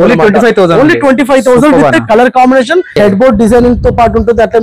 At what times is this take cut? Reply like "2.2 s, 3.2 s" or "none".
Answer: 2.9 s